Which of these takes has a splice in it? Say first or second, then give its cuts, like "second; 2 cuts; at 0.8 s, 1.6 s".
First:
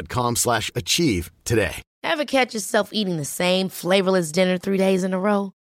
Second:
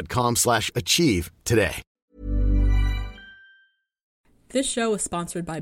first; 1 cut; at 1.9 s